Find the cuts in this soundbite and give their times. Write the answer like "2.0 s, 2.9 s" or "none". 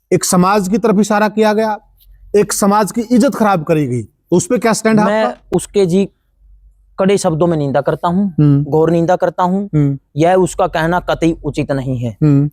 none